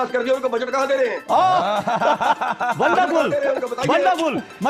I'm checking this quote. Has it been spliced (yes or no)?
no